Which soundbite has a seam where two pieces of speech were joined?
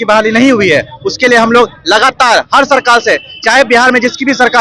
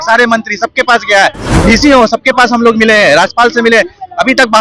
second; 1 cut; at 1.4 s

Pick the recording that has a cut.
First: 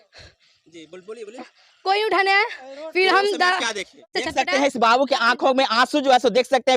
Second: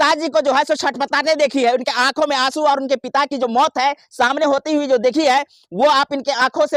first; 1 cut; at 4.1 s

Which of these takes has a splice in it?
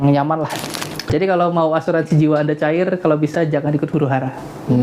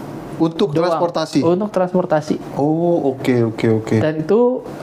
first; 1 cut; at 1.0 s

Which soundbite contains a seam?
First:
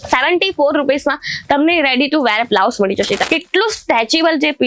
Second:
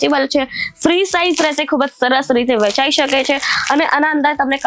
first; 1 cut; at 3.2 s

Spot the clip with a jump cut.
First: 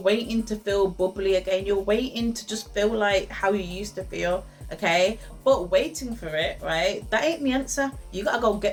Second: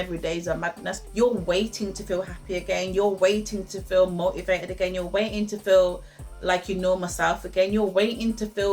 second; 1 cut; at 1.0 s

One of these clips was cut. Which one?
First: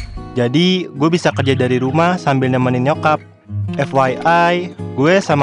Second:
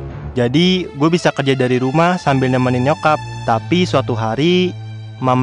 second; 1 cut; at 3.3 s

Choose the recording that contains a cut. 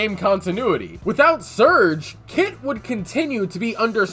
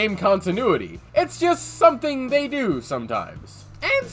first; 1 cut; at 0.9 s

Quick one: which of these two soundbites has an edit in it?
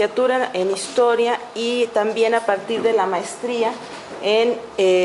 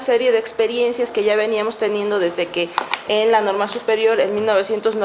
first; 1 cut; at 2.8 s

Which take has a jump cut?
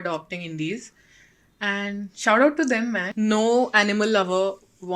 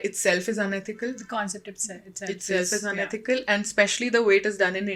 first; 1 cut; at 3.0 s

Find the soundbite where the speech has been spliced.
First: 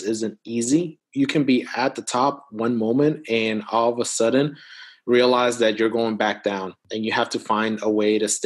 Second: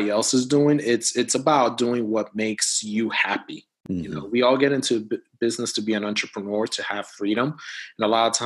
first; 2 cuts; at 1.0 s, 6.8 s

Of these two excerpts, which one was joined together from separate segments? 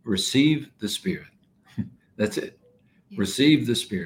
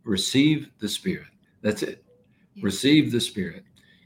second; 1 cut; at 1.5 s

